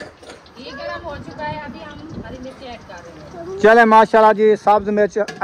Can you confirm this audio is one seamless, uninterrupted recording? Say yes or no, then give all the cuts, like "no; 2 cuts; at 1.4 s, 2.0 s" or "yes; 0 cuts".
yes; 0 cuts